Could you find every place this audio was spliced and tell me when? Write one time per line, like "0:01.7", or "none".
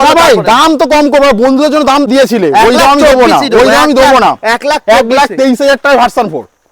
0:02.1